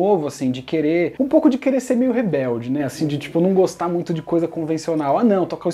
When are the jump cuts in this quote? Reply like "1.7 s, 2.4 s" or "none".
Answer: none